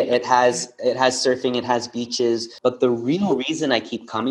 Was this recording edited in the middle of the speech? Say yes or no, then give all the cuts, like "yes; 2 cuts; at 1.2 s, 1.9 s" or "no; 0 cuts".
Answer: yes; 1 cut; at 2.5 s